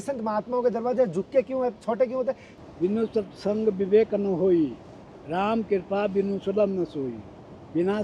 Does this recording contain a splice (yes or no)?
yes